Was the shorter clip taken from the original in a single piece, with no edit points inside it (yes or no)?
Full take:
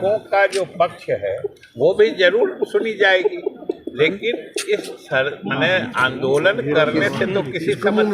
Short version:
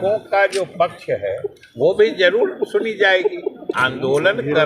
no